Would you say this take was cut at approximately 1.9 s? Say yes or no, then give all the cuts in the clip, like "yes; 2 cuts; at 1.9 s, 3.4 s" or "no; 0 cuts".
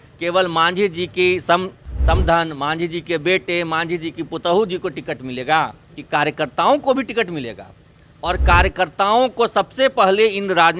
no; 0 cuts